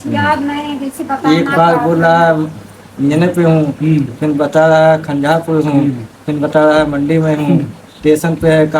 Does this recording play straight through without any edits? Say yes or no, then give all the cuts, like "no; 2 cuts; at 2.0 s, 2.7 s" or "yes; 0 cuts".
yes; 0 cuts